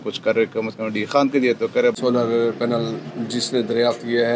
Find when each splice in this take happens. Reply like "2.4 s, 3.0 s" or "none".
1.9 s